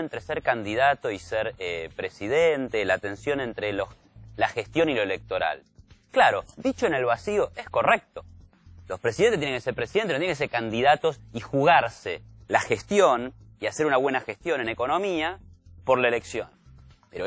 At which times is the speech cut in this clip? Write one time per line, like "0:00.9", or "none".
none